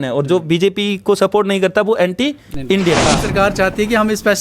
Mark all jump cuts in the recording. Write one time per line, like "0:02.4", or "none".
0:03.1

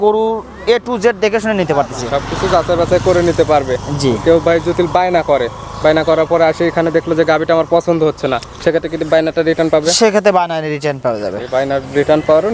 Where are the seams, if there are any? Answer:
none

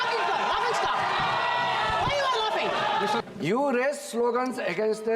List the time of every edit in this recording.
0:03.2

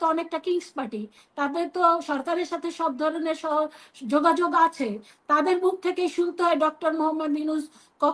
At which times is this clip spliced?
none

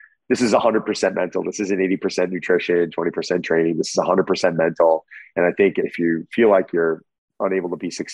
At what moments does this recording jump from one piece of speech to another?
0:05.8

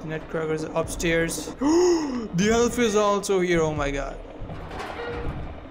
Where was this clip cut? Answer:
0:01.5

